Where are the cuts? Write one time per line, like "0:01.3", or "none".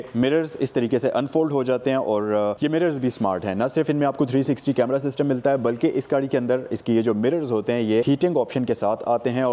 0:02.6
0:08.0